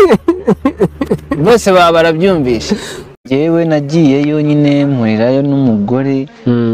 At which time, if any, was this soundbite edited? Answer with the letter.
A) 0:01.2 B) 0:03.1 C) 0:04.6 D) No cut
B